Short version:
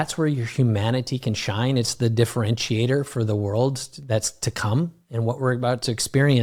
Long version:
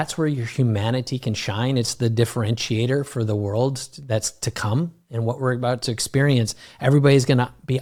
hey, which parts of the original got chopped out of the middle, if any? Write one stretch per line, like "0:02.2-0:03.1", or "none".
none